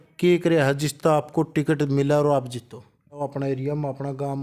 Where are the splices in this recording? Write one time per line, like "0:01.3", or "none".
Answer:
0:03.3